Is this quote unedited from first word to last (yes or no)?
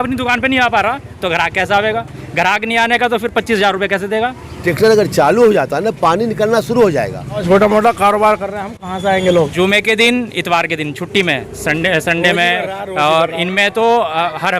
no